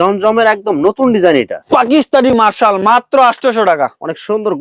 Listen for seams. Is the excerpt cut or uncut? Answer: cut